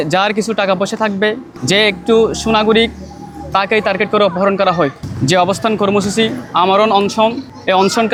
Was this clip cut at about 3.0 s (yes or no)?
no